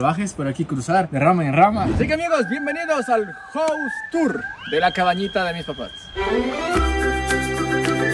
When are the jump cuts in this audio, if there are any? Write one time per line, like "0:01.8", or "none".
0:01.1
0:01.9

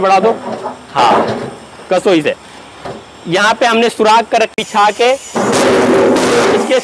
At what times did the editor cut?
0:04.5

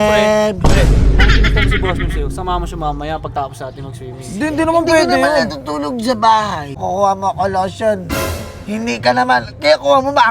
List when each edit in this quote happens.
0:06.8

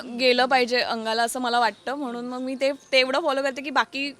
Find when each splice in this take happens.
none

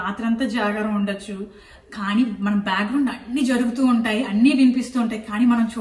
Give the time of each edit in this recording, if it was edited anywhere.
none

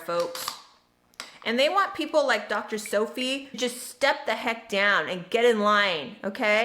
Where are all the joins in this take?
0:03.6

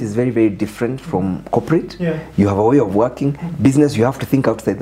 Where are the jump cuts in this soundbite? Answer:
none

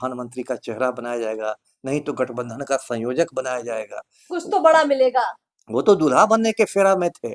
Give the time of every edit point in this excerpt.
none

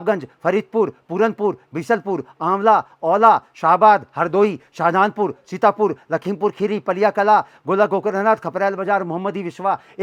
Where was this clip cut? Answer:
none

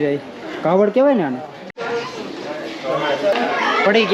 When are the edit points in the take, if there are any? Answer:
0:01.7
0:03.3

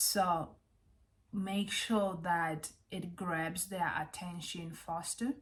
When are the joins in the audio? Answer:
none

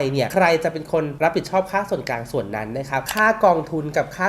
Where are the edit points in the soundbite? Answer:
0:03.0

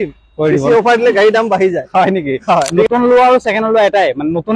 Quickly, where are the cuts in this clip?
0:02.9

